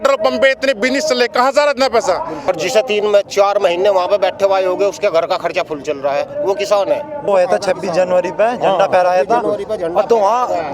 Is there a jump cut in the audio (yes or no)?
yes